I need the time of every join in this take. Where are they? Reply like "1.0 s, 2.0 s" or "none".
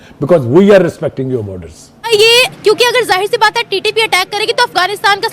2.1 s